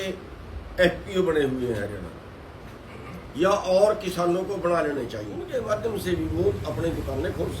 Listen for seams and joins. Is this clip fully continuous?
no; 1 cut; at 5.5 s

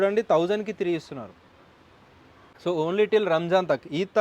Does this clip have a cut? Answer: yes; 1 cut; at 2.5 s

